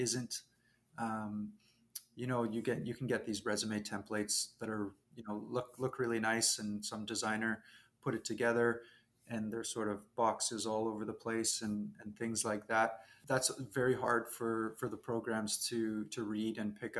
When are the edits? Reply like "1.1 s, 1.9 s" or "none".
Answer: 13.1 s

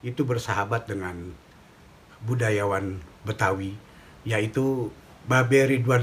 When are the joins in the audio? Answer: 5.1 s

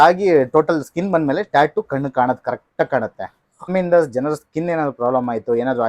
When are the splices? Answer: 3.7 s

